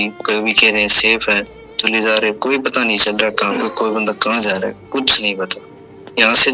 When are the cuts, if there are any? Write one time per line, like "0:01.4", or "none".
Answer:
0:01.9

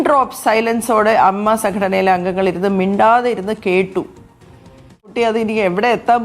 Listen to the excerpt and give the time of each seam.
0:05.0

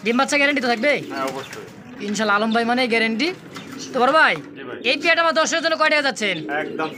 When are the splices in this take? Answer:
none

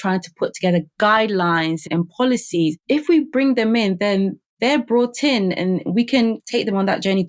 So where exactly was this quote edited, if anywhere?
0:01.9
0:06.4

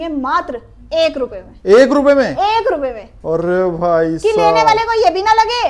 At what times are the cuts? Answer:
none

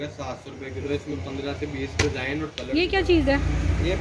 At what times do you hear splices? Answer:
0:02.7

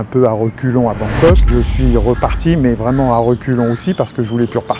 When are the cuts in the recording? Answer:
none

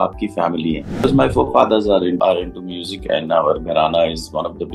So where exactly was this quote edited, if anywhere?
0:01.0
0:02.2

